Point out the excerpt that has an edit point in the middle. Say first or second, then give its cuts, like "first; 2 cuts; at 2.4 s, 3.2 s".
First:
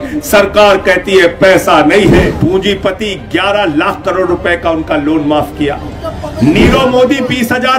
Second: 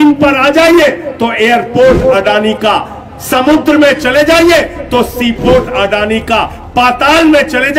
first; 1 cut; at 2.2 s